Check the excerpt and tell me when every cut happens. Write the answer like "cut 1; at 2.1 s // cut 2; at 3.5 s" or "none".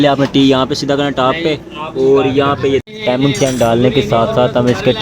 cut 1; at 2.9 s